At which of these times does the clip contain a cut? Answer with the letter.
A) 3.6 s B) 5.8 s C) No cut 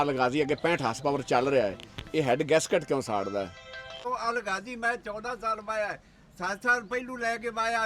A